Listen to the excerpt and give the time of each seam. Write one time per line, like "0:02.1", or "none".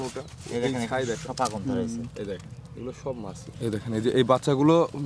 0:03.5

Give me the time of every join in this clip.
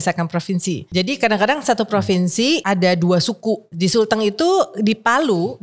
0:00.8
0:02.6
0:03.7

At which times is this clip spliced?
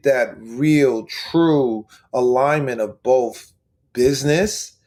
none

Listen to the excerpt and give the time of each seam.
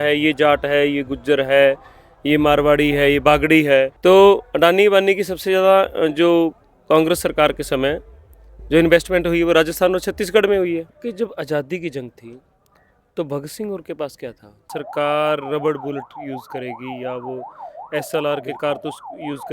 0:03.9
0:11.0
0:14.7

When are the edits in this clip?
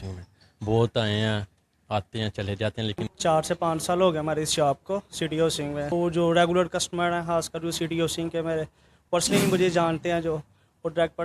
0:03.1
0:05.9

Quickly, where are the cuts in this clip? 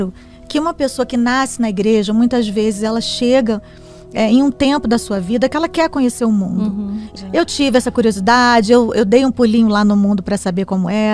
0:07.1

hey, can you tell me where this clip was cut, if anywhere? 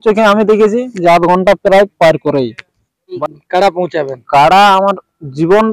0:03.1

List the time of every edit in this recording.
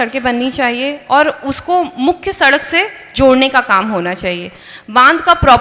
none

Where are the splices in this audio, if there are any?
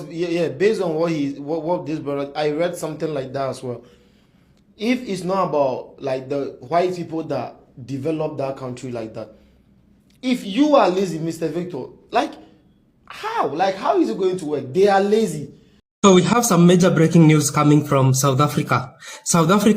0:15.8

